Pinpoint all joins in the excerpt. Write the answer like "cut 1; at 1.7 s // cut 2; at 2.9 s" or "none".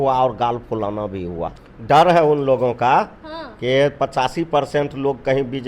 cut 1; at 1.7 s